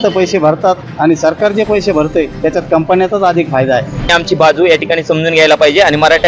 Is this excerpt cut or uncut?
cut